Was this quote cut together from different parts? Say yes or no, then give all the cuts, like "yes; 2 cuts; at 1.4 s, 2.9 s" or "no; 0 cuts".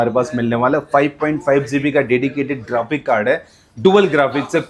no; 0 cuts